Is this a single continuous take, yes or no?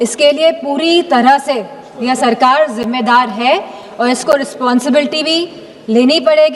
yes